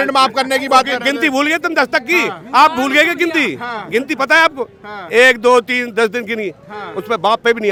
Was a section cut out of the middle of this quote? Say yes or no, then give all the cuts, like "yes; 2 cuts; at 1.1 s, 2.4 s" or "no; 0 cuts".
no; 0 cuts